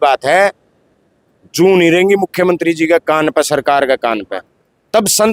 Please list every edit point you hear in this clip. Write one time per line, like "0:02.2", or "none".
none